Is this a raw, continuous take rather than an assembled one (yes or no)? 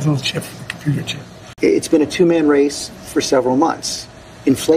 yes